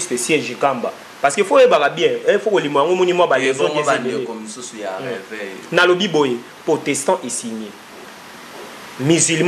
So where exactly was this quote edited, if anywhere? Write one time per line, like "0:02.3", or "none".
none